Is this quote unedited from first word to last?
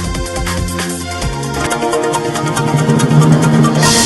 yes; 0 cuts

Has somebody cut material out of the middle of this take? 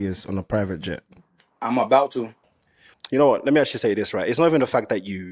yes; 1 cut; at 2.3 s

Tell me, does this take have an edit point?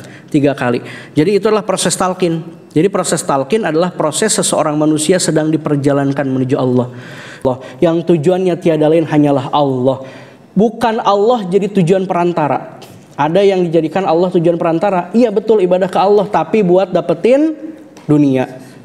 yes; 1 cut; at 7.4 s

